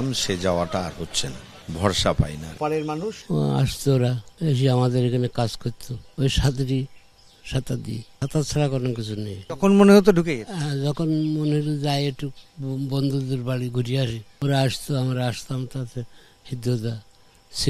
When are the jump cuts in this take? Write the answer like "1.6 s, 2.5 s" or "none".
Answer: 2.5 s